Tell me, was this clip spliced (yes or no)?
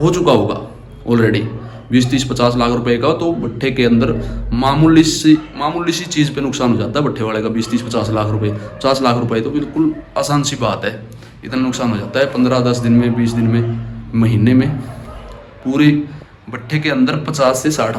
no